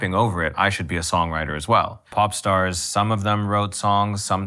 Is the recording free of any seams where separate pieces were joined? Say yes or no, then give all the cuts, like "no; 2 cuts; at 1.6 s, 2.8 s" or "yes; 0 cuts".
no; 1 cut; at 2.0 s